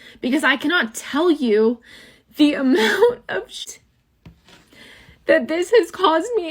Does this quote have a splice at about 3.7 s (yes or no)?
yes